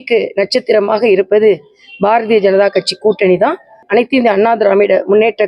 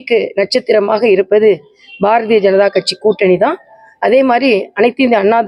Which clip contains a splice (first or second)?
first